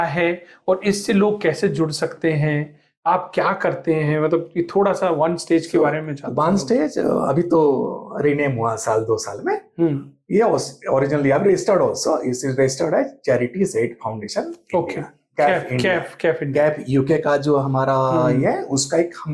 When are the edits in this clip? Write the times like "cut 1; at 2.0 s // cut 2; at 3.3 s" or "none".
none